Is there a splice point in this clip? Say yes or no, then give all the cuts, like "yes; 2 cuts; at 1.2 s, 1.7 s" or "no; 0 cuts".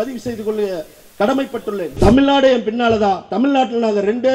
yes; 1 cut; at 2.0 s